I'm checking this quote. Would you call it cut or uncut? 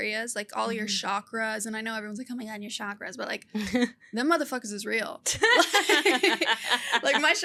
uncut